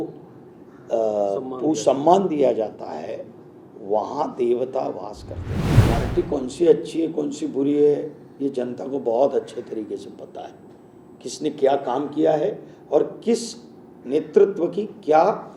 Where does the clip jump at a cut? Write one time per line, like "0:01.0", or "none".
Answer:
0:05.7